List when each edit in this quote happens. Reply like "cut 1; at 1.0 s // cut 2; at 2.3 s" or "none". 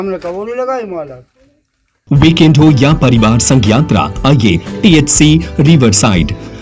cut 1; at 1.9 s